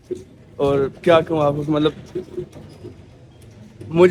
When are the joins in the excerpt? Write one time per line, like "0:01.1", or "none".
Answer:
none